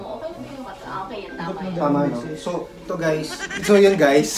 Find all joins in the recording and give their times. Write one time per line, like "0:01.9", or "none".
0:03.5